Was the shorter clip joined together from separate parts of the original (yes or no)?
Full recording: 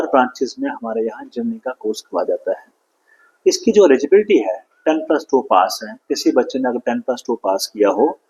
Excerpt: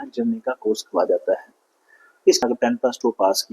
yes